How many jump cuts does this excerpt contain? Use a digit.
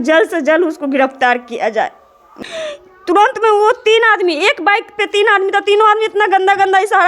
1